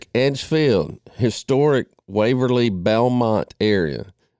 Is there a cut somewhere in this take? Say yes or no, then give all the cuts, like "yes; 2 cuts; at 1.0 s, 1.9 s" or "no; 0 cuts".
no; 0 cuts